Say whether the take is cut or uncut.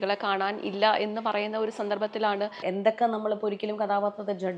cut